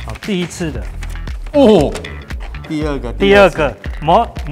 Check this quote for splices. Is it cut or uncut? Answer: cut